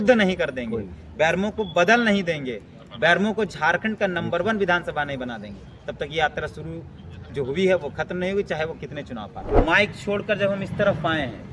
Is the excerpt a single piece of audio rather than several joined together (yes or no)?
no